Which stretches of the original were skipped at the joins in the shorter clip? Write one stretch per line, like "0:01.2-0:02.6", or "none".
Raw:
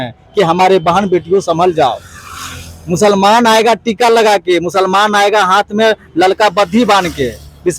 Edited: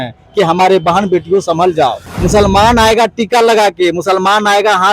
0:02.1-0:02.8